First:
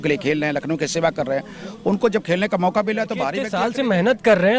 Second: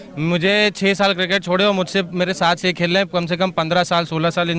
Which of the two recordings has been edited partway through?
first; 1 cut; at 3.5 s

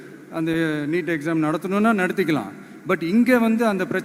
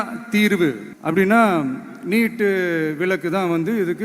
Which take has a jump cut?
second; 1 cut; at 0.9 s

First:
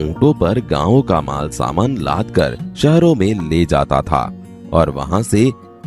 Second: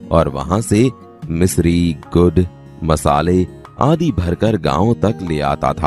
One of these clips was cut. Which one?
first; 1 cut; at 2.6 s

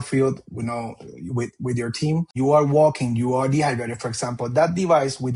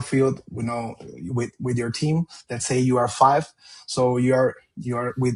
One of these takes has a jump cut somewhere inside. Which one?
first; 1 cut; at 2.3 s

